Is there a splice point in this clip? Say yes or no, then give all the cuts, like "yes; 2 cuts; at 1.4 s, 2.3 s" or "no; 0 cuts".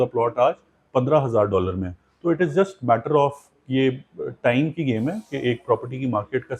no; 0 cuts